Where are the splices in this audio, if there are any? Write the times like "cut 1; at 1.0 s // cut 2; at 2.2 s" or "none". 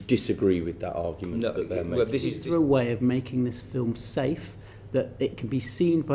cut 1; at 2.4 s